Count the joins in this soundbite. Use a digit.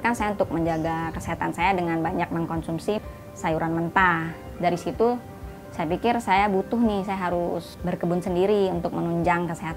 3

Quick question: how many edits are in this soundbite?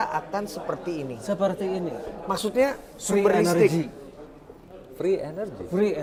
0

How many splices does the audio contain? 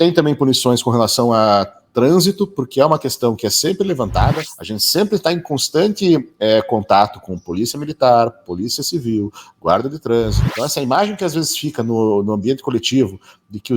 2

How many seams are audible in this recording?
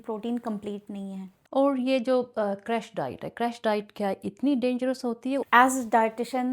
2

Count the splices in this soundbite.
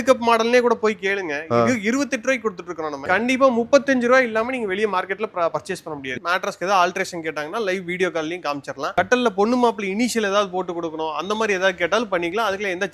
2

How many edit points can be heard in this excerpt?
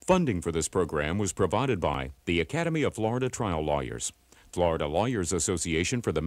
1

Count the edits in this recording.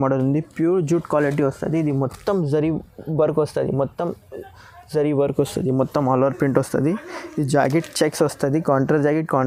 0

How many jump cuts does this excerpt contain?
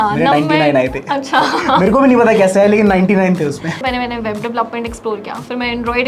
1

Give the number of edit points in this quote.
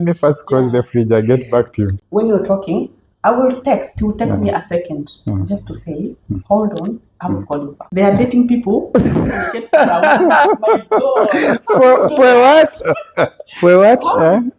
2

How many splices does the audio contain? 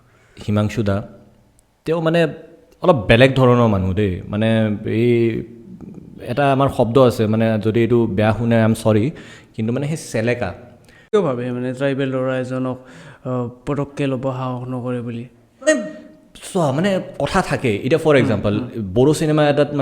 1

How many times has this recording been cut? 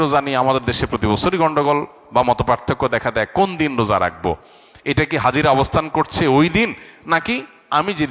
0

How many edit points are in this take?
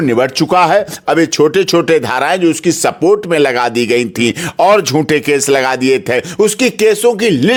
0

